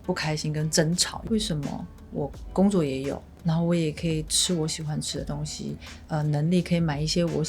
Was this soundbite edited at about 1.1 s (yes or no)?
yes